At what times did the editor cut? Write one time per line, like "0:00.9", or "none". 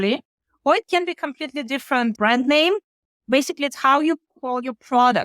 0:02.2